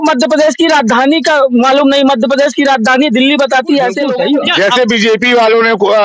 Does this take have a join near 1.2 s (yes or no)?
no